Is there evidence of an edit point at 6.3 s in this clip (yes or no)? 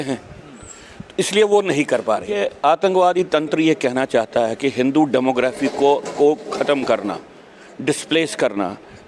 no